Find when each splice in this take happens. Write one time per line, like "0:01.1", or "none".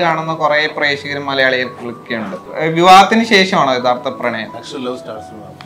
0:02.5
0:04.7